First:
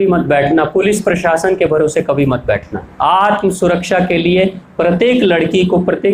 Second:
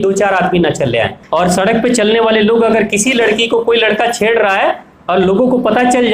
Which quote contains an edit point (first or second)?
second